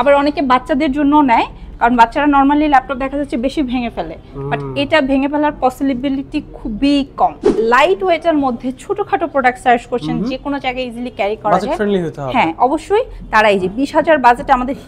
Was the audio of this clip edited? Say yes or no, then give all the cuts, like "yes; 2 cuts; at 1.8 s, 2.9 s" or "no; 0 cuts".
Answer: yes; 1 cut; at 7.5 s